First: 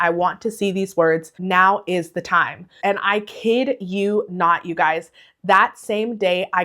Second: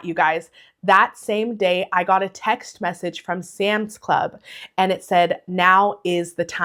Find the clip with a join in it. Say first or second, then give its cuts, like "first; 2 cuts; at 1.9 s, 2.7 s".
first; 1 cut; at 2.8 s